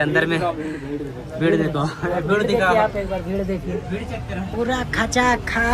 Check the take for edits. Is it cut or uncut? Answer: cut